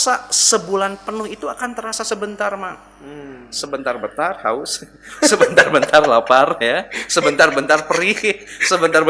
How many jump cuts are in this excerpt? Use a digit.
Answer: 0